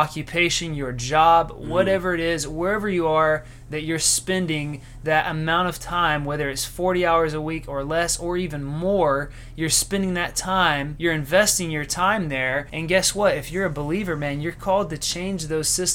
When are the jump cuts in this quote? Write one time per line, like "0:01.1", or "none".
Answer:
0:10.9
0:12.7